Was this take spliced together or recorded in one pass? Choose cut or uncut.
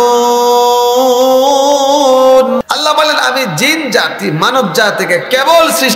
cut